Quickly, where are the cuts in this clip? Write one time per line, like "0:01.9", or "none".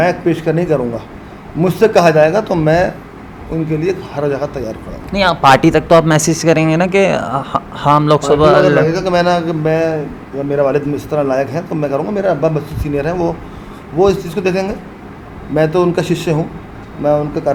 none